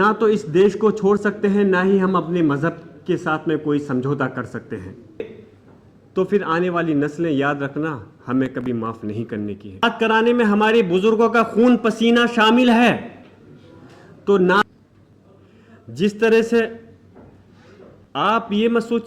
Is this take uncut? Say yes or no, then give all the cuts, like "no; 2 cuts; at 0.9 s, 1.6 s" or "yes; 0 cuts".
no; 3 cuts; at 5.2 s, 9.8 s, 14.6 s